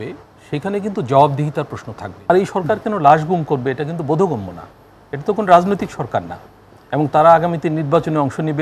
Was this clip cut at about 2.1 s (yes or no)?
yes